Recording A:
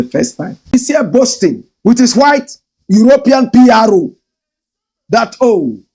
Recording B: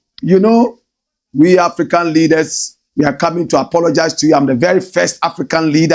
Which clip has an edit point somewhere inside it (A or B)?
A